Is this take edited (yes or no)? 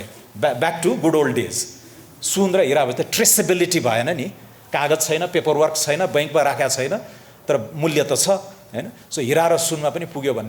no